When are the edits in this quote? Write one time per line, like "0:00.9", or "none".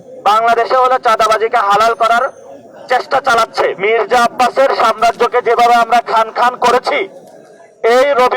0:03.8

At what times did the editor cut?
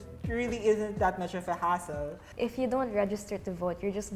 0:02.2

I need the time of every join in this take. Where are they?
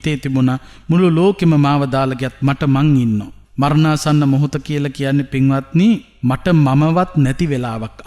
0:03.4
0:06.1

